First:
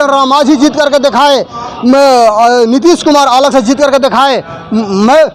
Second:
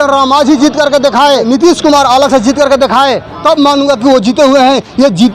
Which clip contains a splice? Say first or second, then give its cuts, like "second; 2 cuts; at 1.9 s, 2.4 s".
second; 2 cuts; at 1.4 s, 3.3 s